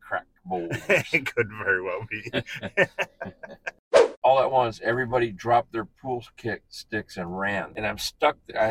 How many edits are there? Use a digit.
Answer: 2